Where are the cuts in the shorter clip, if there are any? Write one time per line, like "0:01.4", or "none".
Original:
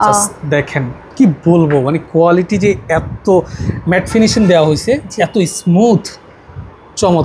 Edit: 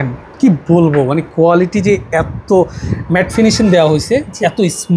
none